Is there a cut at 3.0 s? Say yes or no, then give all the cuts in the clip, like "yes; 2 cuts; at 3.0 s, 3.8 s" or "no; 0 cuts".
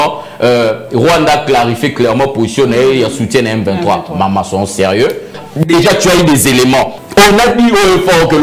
no; 2 cuts; at 5.4 s, 7.0 s